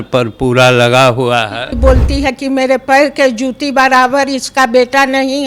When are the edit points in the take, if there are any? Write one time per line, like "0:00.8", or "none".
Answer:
0:01.7